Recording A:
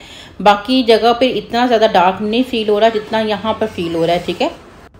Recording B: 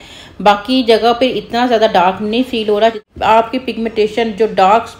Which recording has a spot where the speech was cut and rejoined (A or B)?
B